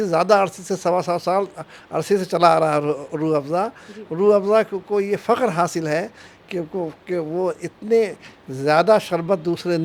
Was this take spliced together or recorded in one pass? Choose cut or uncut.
uncut